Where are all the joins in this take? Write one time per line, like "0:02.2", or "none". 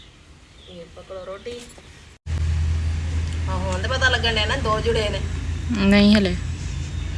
0:02.3